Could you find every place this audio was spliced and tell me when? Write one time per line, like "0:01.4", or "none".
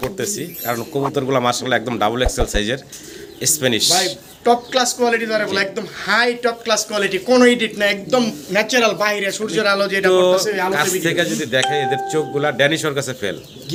none